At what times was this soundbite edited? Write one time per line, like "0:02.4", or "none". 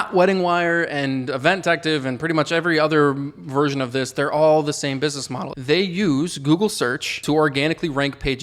0:05.4
0:07.2